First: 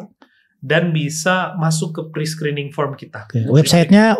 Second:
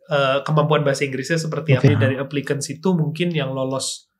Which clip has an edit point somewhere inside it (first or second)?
second